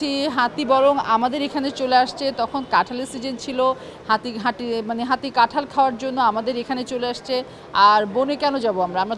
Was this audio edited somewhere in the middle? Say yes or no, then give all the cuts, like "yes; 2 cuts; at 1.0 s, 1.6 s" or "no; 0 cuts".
no; 0 cuts